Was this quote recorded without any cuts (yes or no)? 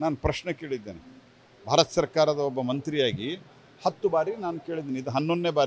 no